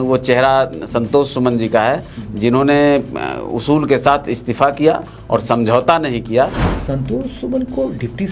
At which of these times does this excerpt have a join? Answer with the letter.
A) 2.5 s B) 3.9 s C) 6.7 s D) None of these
C